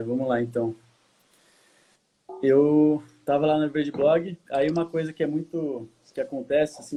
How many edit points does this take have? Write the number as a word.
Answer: zero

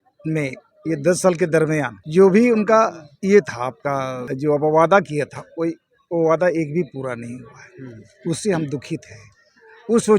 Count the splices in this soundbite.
three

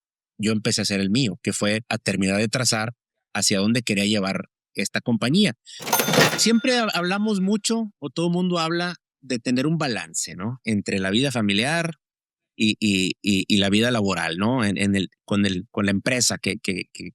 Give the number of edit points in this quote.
one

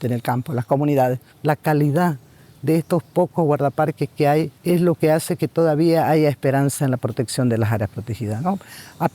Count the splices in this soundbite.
two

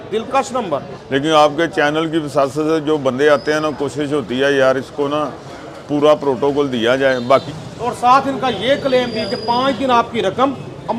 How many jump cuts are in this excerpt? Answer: two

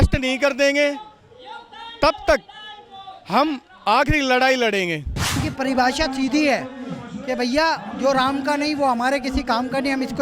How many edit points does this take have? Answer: one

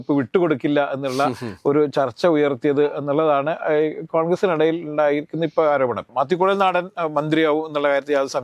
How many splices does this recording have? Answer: one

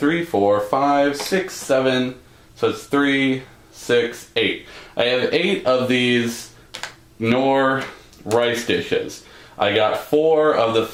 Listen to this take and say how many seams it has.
zero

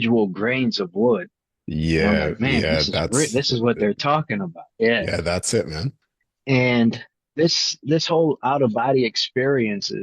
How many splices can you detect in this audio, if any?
one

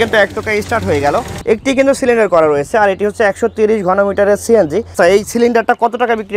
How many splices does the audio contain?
two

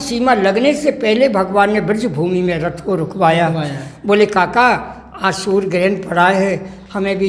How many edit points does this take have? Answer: zero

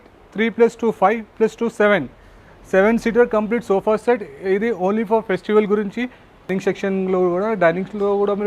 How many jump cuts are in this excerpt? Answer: one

